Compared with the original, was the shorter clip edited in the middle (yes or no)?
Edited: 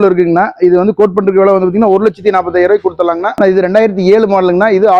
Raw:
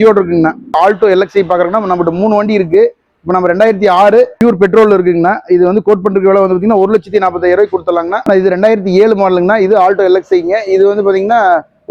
no